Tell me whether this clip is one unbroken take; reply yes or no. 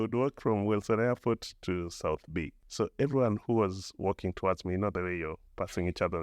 no